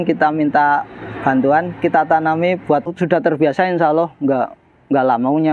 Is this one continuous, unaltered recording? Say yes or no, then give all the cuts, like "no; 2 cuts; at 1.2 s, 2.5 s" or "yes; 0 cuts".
no; 1 cut; at 2.9 s